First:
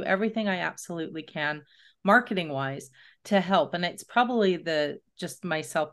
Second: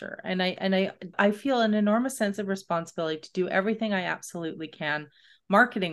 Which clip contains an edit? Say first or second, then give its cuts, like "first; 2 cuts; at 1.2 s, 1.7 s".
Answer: second; 1 cut; at 1.1 s